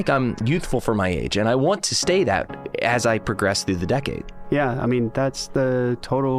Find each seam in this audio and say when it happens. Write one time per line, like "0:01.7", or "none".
0:04.3